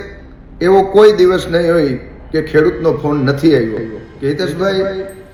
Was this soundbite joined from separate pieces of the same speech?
no; 0 cuts

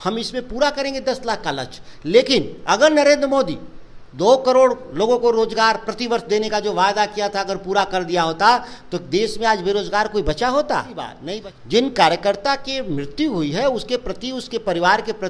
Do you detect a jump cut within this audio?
yes; 1 cut; at 11.2 s

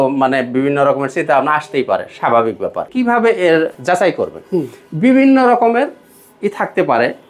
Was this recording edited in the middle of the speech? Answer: yes; 2 cuts; at 2.8 s, 3.7 s

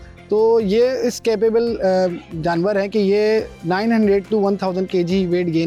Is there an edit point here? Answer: no; 0 cuts

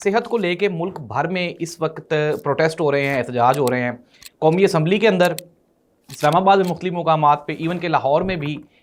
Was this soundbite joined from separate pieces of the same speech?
no; 0 cuts

